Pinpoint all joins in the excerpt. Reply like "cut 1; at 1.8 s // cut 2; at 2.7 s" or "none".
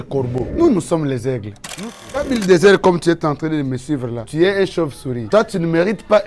cut 1; at 2.2 s

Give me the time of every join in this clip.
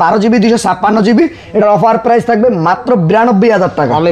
none

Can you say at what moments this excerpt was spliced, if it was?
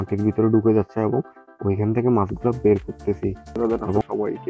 cut 1; at 3.6 s

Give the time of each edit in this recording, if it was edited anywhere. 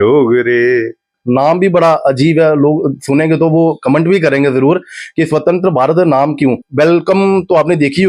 cut 1; at 1.1 s // cut 2; at 6.6 s

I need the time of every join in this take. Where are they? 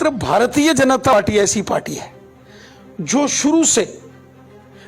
cut 1; at 1.1 s

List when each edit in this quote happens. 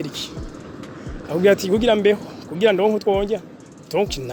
none

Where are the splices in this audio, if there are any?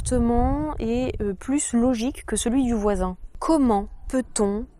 cut 1; at 3.3 s

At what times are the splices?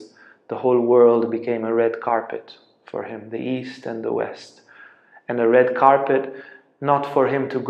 none

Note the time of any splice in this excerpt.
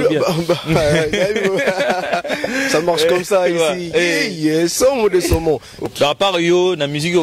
cut 1; at 5.9 s

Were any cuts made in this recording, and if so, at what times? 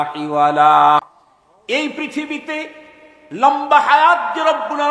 cut 1; at 1.0 s

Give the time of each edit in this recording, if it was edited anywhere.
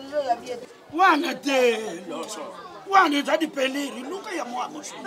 none

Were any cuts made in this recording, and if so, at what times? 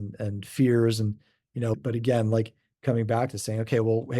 cut 1; at 1.8 s // cut 2; at 2.7 s

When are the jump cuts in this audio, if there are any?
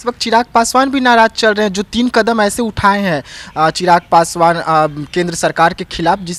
none

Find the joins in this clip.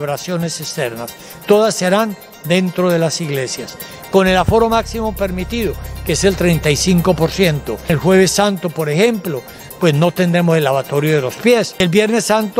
cut 1; at 7.9 s // cut 2; at 11.7 s

